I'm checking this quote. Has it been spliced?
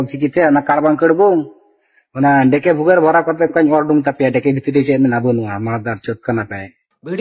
yes; 1 cut; at 1.4 s

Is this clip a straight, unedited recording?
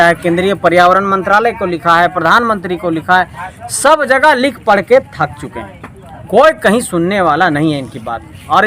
yes; 0 cuts

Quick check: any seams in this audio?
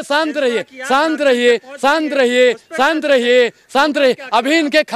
no; 0 cuts

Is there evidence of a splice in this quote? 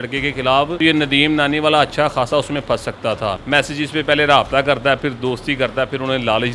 yes; 1 cut; at 3.3 s

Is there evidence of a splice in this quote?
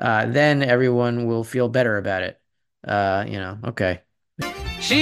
no; 0 cuts

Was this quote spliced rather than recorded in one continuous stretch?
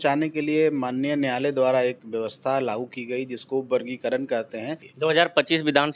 yes; 1 cut; at 4.8 s

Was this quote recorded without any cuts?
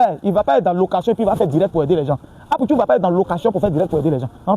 yes; 0 cuts

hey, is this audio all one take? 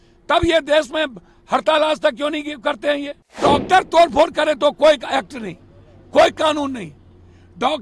no; 1 cut; at 3.4 s

